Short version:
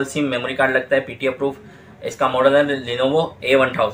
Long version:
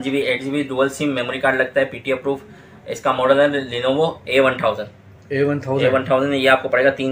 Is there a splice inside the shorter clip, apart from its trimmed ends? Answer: no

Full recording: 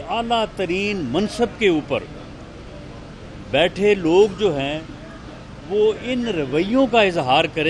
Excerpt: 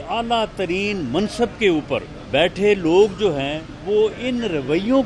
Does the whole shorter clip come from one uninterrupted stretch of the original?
no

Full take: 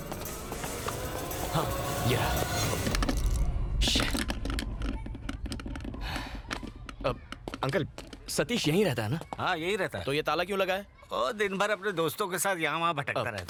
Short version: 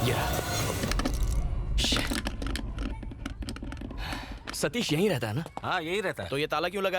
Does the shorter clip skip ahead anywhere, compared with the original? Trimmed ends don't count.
yes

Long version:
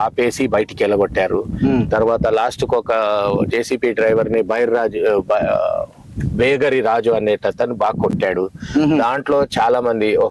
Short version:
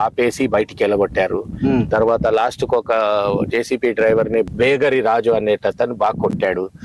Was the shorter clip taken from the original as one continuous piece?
no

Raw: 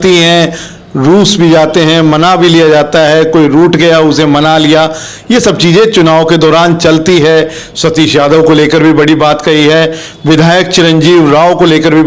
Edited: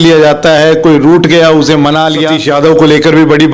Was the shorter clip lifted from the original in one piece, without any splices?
no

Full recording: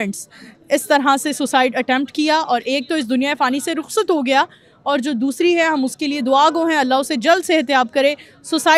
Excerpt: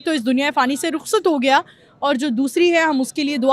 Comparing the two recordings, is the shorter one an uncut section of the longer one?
yes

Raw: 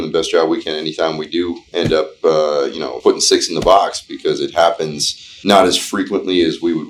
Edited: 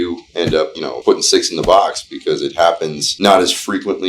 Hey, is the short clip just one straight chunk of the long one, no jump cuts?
no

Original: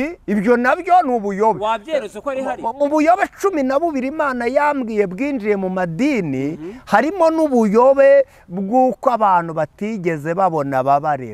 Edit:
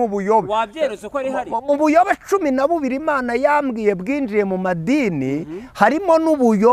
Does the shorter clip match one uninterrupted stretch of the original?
yes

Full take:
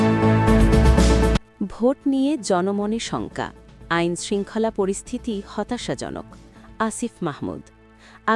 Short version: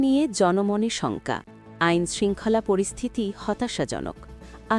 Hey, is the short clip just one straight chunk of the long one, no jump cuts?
yes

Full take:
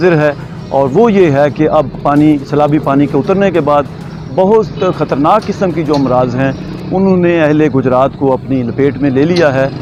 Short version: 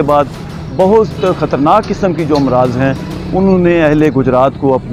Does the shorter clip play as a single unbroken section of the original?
yes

